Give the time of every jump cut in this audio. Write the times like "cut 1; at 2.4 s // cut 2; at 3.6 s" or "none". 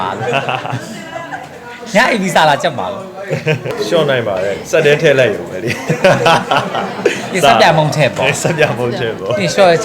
cut 1; at 3.7 s